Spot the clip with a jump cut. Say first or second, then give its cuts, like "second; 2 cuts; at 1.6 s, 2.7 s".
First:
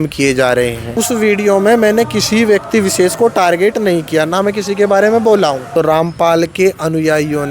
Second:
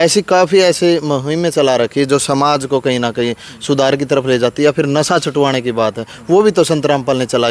first; 2 cuts; at 0.9 s, 5.6 s